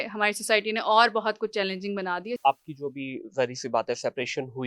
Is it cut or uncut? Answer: cut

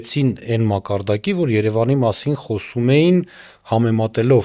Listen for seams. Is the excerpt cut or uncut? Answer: uncut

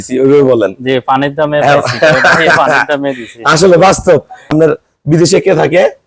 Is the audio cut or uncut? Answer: cut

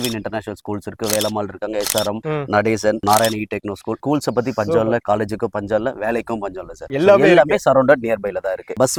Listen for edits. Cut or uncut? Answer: uncut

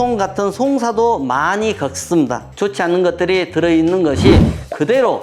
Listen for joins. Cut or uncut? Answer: cut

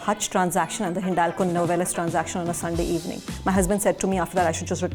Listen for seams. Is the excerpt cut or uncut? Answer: uncut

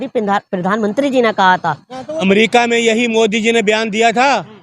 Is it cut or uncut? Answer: cut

